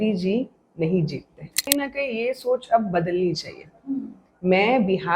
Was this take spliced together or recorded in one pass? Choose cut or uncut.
cut